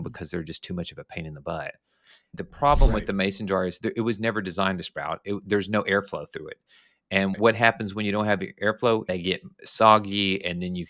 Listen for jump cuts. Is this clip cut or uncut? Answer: cut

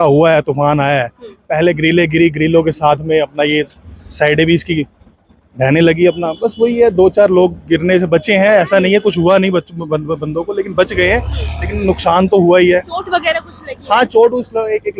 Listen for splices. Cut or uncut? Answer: uncut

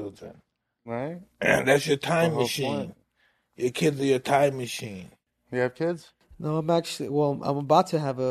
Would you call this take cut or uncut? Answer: cut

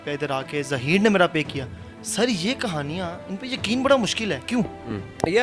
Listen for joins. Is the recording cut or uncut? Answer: uncut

